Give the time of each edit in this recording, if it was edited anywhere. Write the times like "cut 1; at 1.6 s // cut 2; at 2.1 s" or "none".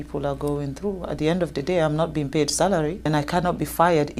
cut 1; at 3.1 s

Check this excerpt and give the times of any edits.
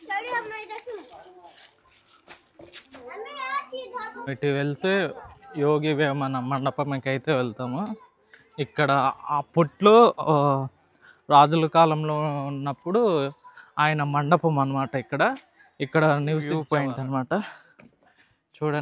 cut 1; at 4.2 s // cut 2; at 16.5 s

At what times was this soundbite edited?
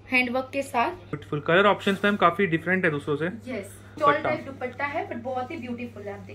cut 1; at 1.2 s // cut 2; at 3.9 s

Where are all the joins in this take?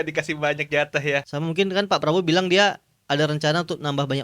cut 1; at 1.3 s

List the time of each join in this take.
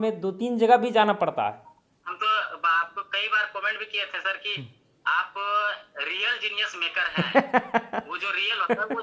cut 1; at 2.0 s

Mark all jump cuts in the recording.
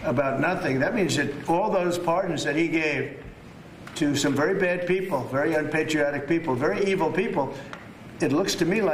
none

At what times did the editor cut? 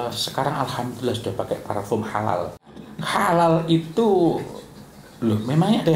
cut 1; at 2.9 s

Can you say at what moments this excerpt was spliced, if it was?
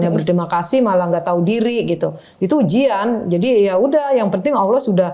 none

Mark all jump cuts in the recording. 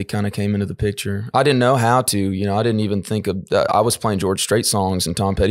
none

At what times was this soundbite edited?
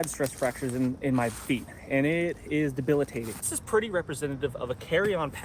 cut 1; at 3.6 s

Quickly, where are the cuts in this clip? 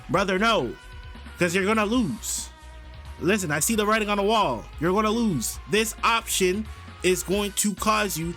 none

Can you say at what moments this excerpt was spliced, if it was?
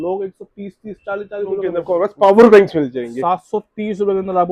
cut 1; at 1.8 s

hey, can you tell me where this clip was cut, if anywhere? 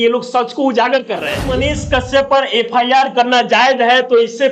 cut 1; at 1.4 s

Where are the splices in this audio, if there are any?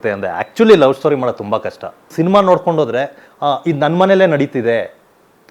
cut 1; at 2.1 s

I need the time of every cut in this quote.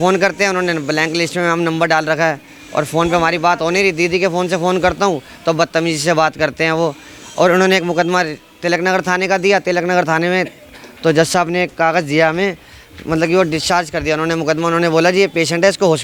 none

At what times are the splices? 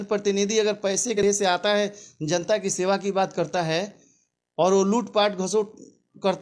cut 1; at 1.2 s

